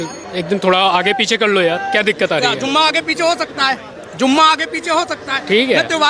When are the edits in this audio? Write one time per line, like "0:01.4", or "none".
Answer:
none